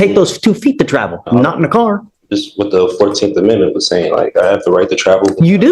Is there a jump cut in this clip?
no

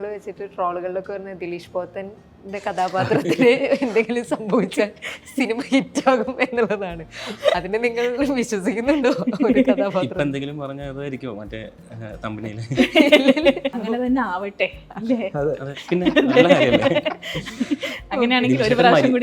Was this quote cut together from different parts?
yes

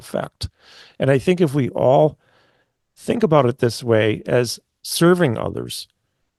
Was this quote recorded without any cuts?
yes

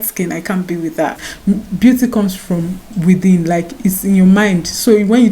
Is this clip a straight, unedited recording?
no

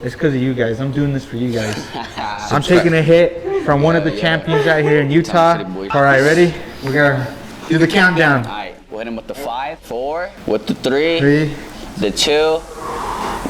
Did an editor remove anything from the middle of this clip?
yes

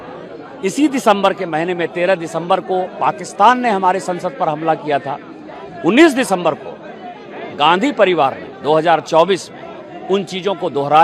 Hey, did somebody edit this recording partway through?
no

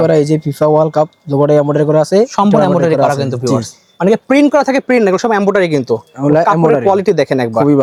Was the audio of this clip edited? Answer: no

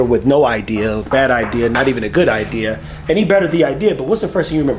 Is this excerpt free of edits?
yes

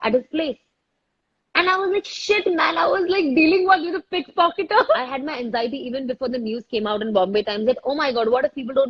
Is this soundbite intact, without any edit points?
no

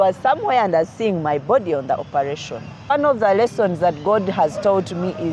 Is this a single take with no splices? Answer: no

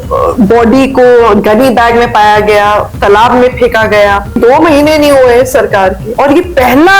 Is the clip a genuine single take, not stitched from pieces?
no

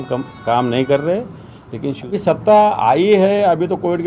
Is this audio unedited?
no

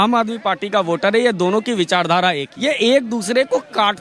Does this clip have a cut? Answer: yes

